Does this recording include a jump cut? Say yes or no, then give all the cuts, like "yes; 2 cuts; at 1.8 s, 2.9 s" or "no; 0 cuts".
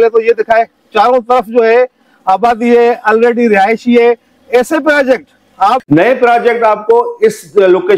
yes; 1 cut; at 5.8 s